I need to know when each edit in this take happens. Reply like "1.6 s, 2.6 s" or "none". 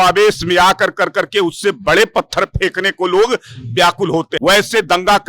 4.3 s